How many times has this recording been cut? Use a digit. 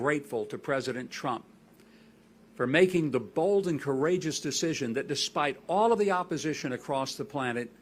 0